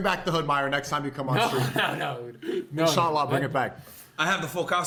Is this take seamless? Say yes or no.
yes